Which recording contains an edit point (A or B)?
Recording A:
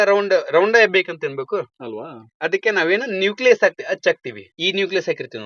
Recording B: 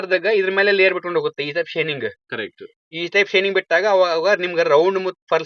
A